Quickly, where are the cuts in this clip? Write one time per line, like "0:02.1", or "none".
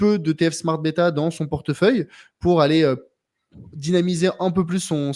none